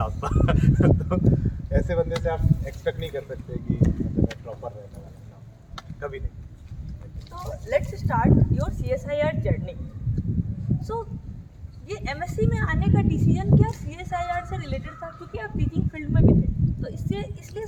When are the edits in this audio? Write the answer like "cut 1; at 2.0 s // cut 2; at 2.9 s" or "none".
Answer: none

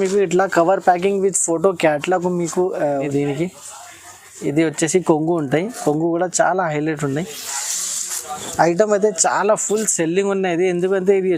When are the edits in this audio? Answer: cut 1; at 2.9 s

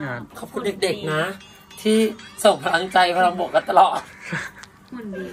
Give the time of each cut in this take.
none

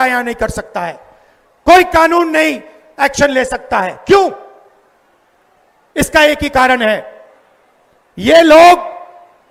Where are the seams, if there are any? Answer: none

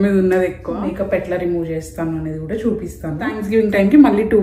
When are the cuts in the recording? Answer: cut 1; at 0.9 s // cut 2; at 3.4 s

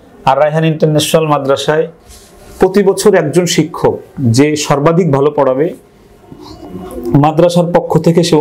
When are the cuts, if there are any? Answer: none

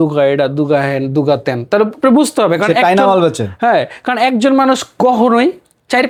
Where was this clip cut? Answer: none

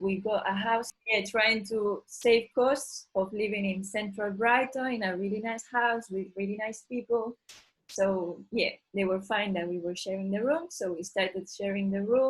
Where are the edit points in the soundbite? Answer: cut 1; at 1.0 s

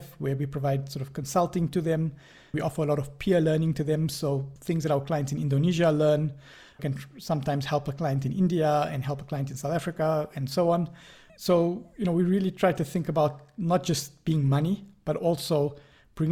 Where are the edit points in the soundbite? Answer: cut 1; at 2.6 s // cut 2; at 4.5 s // cut 3; at 6.8 s

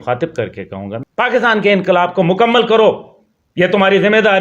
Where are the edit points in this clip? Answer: cut 1; at 0.9 s

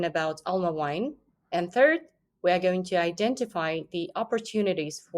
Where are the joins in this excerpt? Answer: cut 1; at 1.2 s

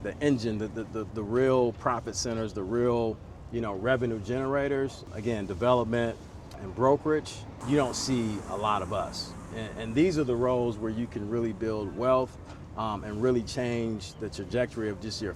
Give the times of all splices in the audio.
cut 1; at 7.6 s

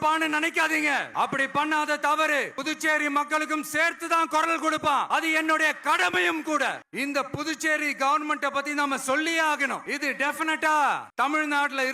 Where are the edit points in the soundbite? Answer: cut 1; at 1.1 s // cut 2; at 2.6 s // cut 3; at 5.1 s // cut 4; at 6.9 s // cut 5; at 9.9 s

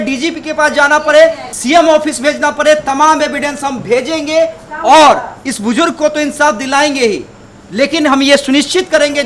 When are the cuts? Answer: cut 1; at 1.5 s

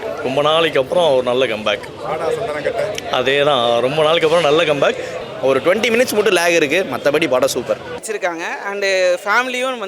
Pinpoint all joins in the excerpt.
cut 1; at 5.1 s // cut 2; at 8.0 s

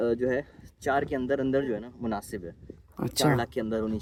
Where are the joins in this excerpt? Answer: none

